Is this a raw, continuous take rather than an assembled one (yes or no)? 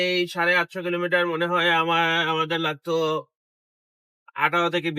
yes